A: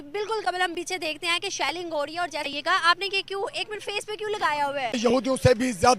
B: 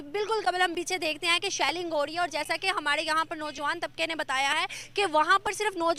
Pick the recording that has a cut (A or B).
A